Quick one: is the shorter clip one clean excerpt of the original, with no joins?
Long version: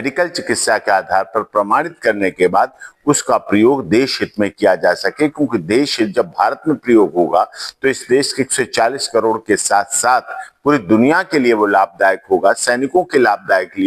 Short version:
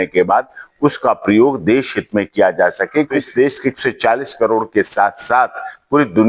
no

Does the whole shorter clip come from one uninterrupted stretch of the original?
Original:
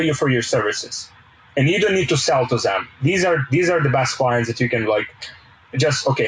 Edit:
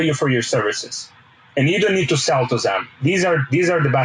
yes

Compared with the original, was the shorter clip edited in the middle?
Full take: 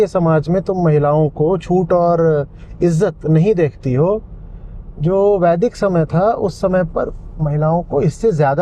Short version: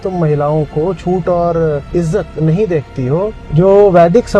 yes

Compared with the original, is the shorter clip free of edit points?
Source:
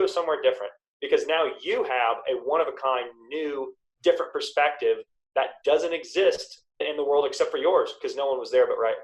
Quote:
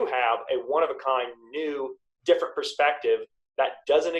yes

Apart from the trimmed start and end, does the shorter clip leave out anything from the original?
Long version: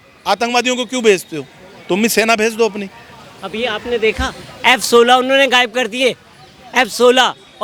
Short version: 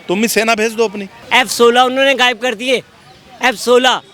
yes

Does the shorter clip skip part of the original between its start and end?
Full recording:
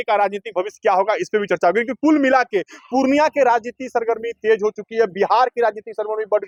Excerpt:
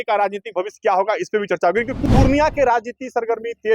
yes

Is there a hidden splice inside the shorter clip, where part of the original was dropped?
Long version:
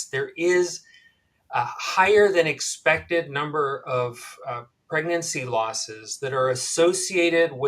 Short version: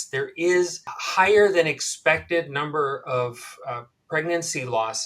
yes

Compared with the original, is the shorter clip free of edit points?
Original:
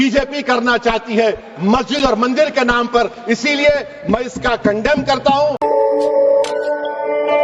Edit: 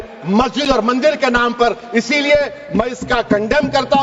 yes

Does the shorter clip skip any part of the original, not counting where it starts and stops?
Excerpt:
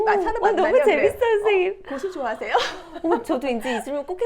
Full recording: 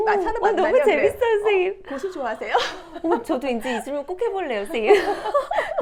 no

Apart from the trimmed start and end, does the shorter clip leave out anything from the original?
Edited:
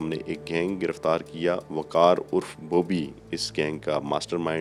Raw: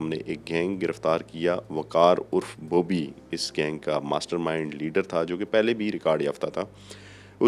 no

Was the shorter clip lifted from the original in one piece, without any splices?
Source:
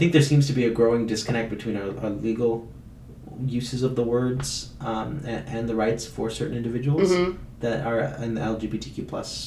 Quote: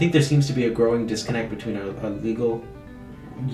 yes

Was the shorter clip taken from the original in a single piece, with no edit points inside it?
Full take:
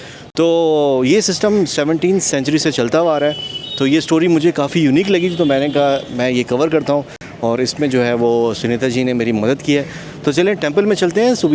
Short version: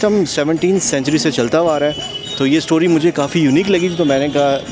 yes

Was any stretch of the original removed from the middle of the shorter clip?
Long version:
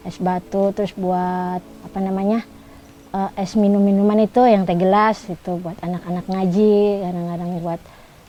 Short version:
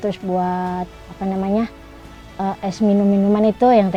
no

